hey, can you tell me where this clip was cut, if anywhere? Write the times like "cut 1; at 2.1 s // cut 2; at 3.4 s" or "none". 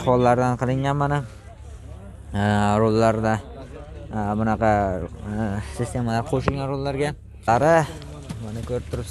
cut 1; at 7.5 s